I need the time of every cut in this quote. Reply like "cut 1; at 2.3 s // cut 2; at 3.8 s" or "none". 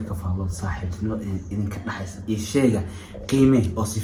none